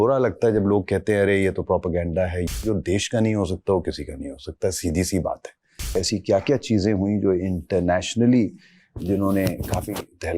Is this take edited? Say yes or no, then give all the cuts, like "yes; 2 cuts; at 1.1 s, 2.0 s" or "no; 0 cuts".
yes; 2 cuts; at 2.6 s, 6.0 s